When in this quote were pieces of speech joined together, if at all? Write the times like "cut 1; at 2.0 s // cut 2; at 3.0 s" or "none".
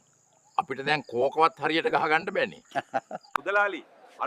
cut 1; at 3.3 s